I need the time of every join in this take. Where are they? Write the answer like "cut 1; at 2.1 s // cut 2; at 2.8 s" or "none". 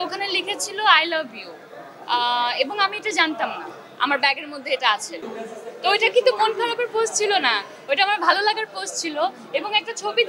cut 1; at 5.2 s